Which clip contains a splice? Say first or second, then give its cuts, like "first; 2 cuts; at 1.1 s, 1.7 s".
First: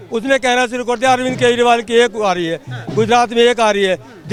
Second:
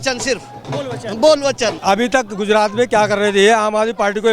second; 1 cut; at 1.8 s